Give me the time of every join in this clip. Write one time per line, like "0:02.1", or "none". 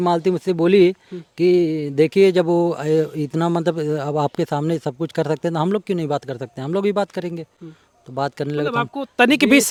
none